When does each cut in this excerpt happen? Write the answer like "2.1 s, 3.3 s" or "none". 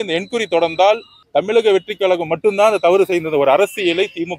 1.1 s